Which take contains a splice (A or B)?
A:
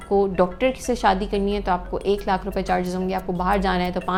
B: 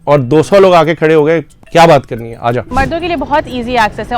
B